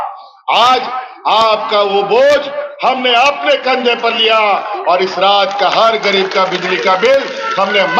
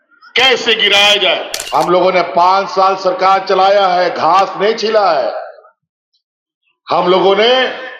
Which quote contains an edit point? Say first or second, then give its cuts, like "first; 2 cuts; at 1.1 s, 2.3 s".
second; 1 cut; at 1.5 s